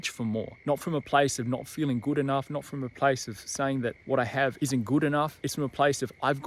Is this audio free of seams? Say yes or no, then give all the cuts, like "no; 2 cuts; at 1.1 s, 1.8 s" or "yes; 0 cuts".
no; 2 cuts; at 4.2 s, 5.4 s